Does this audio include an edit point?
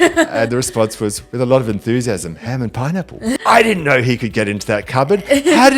yes; 1 cut; at 3.4 s

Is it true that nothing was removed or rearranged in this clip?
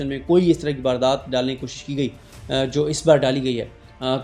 yes; 0 cuts

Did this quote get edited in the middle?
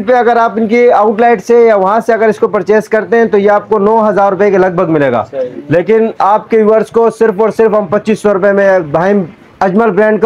no; 0 cuts

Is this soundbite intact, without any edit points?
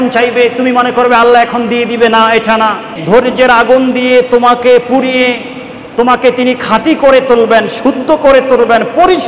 no; 1 cut; at 3.0 s

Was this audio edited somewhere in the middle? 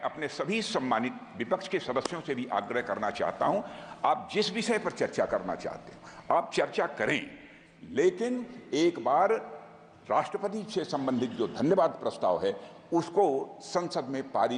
no; 0 cuts

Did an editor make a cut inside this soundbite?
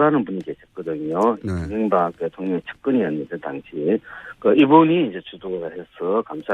yes; 1 cut; at 3.9 s

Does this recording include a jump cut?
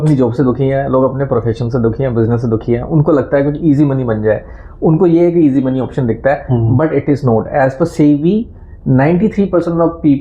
no; 0 cuts

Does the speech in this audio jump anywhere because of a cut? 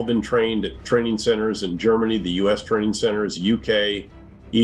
no; 0 cuts

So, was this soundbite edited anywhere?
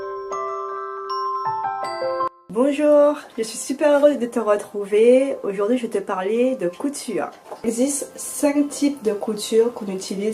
yes; 1 cut; at 2.3 s

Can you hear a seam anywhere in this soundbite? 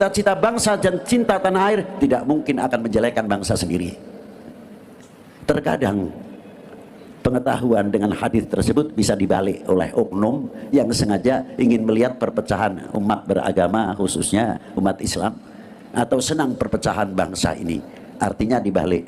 yes; 1 cut; at 5.3 s

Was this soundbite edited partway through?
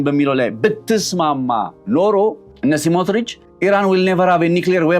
yes; 2 cuts; at 2.5 s, 3.4 s

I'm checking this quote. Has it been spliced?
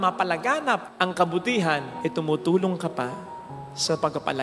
no; 0 cuts

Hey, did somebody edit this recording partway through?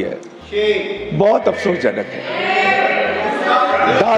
no; 0 cuts

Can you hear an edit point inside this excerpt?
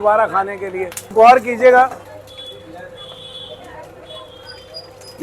yes; 1 cut; at 1.1 s

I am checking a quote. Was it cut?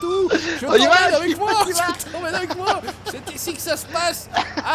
no; 0 cuts

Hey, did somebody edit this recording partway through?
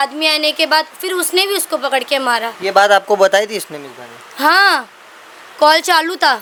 no; 0 cuts

